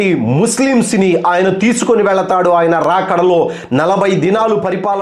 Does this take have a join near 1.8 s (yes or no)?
no